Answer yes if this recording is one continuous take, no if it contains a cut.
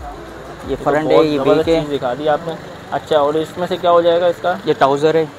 yes